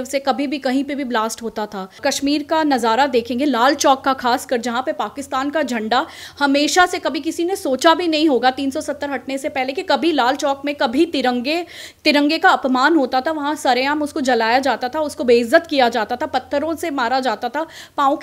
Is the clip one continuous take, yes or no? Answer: no